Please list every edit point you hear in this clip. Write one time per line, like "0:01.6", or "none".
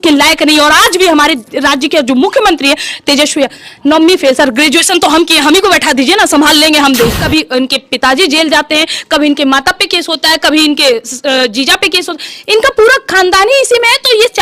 0:07.2